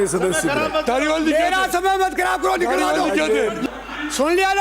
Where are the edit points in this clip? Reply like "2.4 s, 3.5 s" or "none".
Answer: 3.6 s